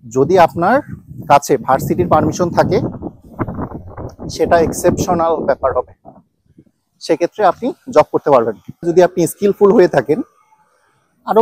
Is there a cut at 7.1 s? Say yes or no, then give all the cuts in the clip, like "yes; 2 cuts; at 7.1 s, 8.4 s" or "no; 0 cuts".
no; 1 cut; at 8.8 s